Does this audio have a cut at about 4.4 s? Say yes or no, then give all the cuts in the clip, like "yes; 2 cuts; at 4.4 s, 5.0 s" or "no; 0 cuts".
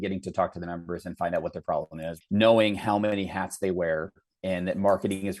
no; 1 cut; at 2.1 s